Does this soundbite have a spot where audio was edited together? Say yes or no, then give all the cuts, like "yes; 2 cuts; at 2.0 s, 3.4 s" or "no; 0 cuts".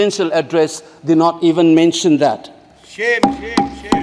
no; 0 cuts